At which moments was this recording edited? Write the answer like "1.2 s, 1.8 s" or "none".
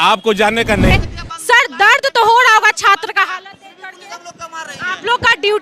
0.9 s

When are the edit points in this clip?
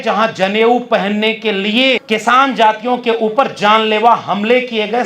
2.0 s

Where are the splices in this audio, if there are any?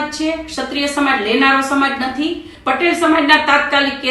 2.5 s

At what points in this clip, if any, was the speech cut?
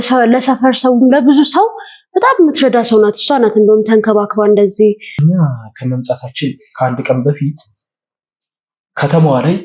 5.2 s

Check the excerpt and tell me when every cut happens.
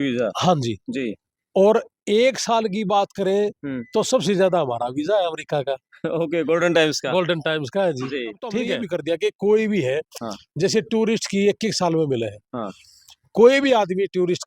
8.7 s

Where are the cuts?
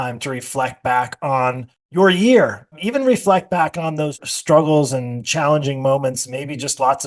none

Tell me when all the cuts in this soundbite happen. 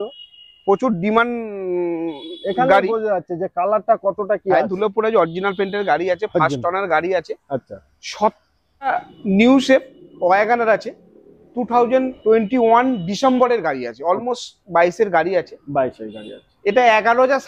8.9 s

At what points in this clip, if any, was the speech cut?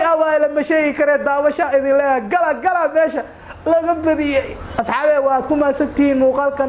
none

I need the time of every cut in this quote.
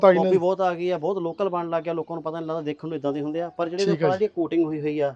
none

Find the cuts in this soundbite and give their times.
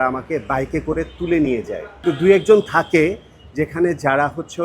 1.8 s

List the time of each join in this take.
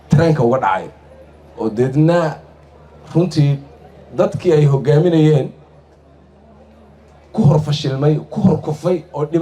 none

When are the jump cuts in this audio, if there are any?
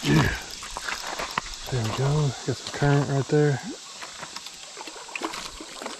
none

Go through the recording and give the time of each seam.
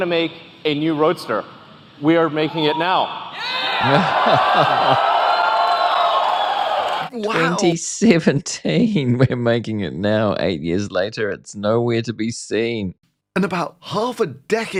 none

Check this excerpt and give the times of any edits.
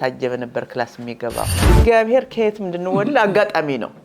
1.5 s

